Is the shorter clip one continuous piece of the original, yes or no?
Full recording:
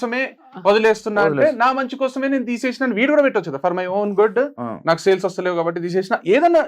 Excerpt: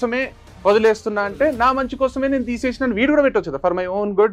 yes